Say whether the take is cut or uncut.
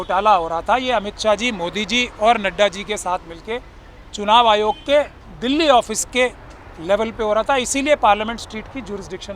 uncut